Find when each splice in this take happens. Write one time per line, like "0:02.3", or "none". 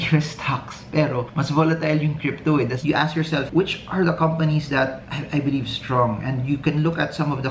0:02.8